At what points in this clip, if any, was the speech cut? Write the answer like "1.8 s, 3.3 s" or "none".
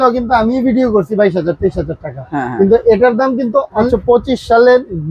3.9 s